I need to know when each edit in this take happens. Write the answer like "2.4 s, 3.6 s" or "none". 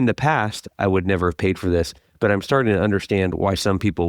none